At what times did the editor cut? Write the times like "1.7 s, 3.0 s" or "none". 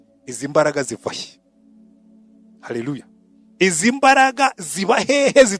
none